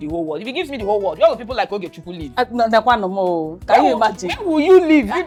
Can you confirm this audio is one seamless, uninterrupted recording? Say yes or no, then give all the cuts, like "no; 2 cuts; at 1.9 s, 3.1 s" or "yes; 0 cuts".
yes; 0 cuts